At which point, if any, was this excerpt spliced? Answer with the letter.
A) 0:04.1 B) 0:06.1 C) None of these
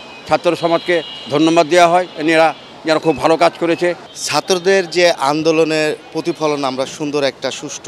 A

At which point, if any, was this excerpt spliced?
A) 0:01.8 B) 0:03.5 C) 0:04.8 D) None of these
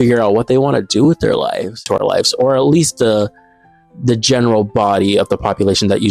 A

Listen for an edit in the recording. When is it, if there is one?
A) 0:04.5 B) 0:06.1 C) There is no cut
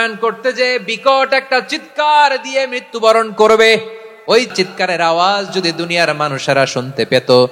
A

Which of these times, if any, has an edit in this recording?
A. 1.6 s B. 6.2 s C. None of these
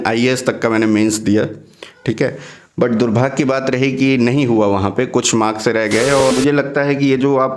B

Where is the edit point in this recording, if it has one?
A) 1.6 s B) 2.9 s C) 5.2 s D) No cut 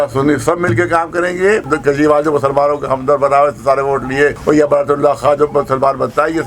A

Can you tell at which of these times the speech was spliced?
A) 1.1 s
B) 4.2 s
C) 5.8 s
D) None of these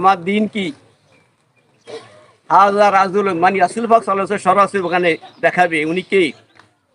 D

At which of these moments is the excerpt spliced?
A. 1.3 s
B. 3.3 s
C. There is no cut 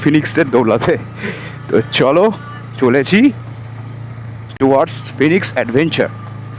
C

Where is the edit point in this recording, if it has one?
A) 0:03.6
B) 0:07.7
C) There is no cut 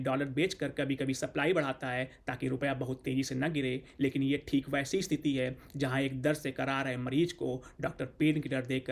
C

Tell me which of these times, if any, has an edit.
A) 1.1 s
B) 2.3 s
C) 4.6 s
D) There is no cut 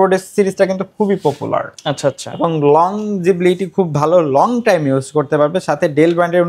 D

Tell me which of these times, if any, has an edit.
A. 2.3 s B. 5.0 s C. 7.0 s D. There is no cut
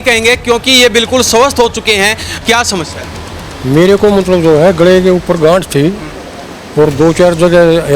A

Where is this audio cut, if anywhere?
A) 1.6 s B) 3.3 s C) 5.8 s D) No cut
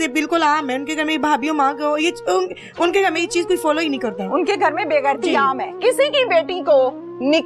C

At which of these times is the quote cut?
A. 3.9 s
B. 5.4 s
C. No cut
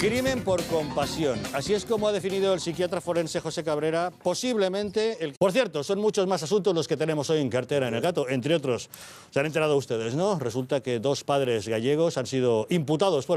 C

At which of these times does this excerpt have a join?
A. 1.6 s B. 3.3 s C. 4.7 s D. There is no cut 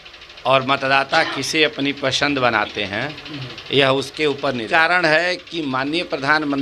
C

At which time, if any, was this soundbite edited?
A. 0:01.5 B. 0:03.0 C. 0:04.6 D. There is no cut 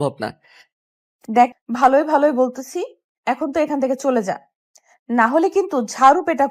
A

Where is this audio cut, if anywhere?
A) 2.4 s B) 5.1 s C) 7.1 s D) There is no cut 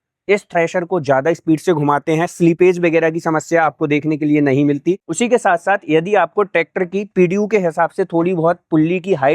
B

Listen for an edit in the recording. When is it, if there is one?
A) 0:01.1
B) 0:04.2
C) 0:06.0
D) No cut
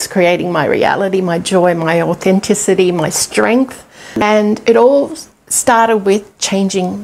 B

